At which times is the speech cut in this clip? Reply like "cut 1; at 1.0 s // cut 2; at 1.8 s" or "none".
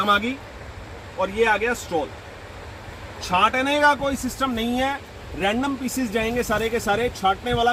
none